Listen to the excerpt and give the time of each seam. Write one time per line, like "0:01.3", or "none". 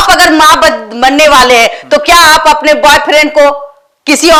none